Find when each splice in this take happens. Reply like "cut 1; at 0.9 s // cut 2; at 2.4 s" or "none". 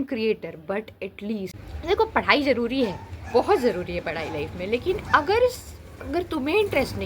cut 1; at 1.7 s